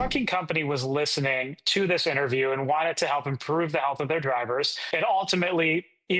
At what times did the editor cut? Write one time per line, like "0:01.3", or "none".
0:04.8